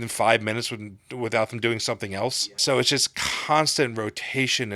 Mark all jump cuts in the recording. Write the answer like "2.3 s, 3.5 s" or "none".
2.6 s